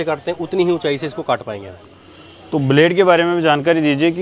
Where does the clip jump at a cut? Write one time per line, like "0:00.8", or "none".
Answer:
none